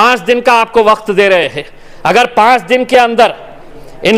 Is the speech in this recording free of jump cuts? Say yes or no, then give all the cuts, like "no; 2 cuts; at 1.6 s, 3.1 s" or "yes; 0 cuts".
yes; 0 cuts